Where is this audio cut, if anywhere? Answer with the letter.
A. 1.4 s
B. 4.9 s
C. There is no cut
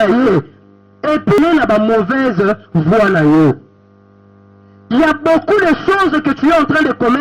A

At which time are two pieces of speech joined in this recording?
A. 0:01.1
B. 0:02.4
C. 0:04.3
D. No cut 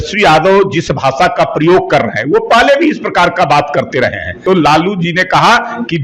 C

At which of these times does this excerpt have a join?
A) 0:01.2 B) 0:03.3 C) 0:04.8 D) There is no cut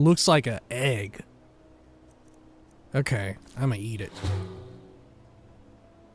A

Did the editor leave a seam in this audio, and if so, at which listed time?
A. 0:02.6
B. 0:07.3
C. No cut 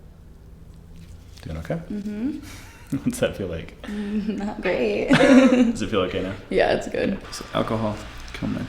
B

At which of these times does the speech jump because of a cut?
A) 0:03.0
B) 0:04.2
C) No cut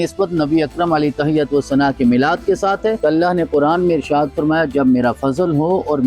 A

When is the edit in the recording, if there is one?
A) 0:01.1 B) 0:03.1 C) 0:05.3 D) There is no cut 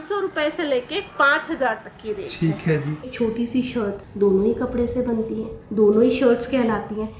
B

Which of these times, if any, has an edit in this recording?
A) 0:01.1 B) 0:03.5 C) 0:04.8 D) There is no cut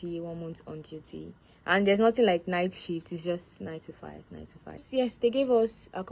C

